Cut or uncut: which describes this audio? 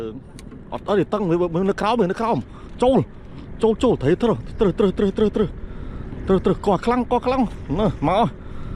uncut